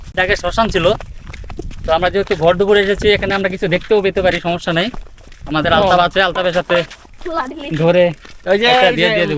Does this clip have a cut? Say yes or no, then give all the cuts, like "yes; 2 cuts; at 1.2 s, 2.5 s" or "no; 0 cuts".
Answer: no; 0 cuts